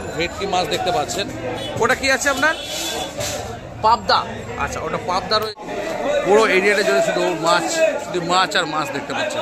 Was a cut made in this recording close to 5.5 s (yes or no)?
yes